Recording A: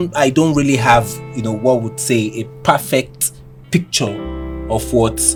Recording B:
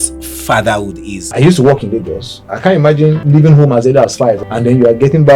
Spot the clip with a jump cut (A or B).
B